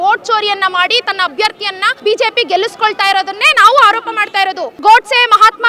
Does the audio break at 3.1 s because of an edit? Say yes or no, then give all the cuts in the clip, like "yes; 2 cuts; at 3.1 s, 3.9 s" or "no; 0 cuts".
no; 2 cuts; at 1.8 s, 4.8 s